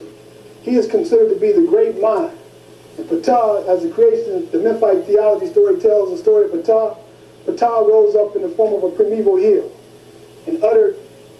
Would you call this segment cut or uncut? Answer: cut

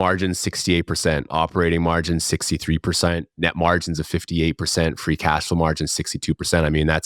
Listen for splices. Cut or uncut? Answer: uncut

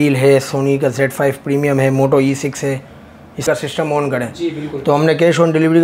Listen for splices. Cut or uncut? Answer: cut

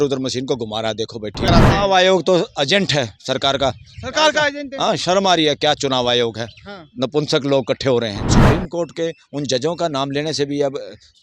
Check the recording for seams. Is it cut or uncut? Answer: cut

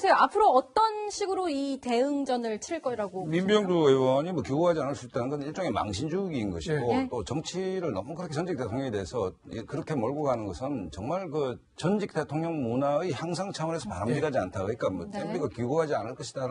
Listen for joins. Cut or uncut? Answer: uncut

